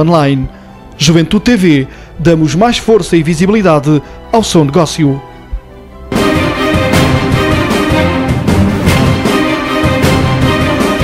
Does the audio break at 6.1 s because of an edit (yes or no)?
yes